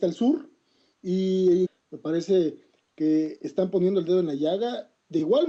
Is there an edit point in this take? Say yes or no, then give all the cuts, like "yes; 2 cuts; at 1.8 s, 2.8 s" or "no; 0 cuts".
no; 0 cuts